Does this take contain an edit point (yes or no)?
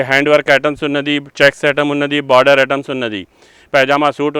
no